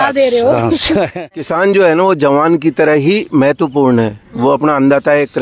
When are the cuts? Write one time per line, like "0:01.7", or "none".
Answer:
0:01.4

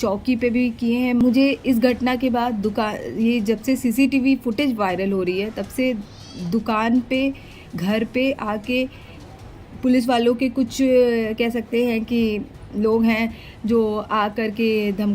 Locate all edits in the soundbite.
0:01.2

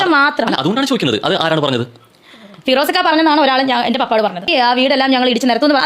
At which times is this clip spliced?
0:04.5

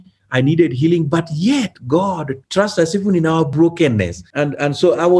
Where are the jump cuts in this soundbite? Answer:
0:02.3
0:03.5
0:04.2

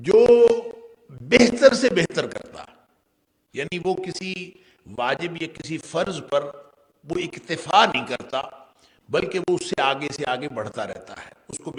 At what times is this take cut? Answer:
none

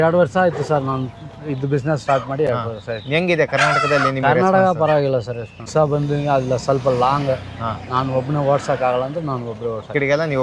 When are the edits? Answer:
none

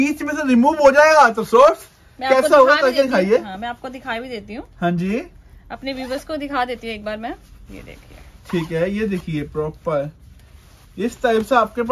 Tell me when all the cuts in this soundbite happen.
none

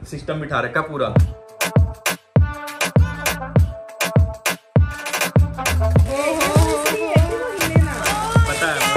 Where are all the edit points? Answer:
none

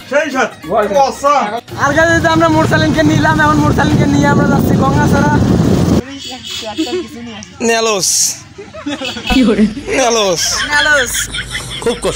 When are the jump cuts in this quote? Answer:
0:01.6
0:06.0

